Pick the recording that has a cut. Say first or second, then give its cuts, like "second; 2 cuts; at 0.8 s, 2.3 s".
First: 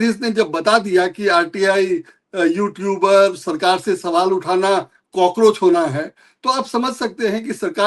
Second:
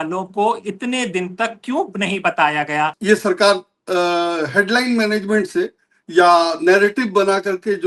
second; 1 cut; at 3.0 s